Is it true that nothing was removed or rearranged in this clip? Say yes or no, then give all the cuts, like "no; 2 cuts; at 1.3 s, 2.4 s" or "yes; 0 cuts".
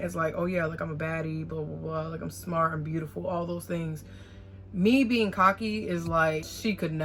yes; 0 cuts